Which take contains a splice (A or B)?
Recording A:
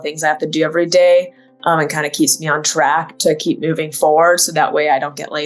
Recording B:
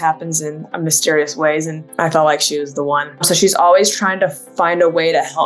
B